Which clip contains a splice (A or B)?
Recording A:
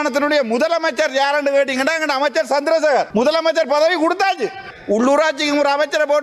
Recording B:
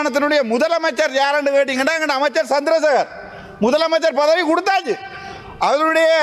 A